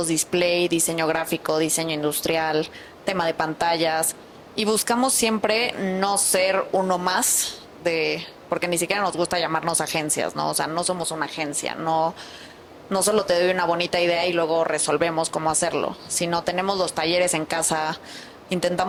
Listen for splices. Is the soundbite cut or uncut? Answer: uncut